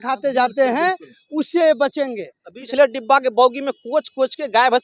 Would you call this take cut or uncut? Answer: cut